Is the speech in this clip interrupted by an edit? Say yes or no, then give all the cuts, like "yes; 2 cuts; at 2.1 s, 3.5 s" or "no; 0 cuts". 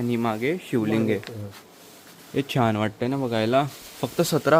no; 0 cuts